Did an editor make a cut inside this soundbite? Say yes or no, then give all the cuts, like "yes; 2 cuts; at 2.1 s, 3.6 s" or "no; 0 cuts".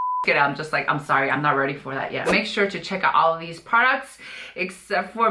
yes; 1 cut; at 2.2 s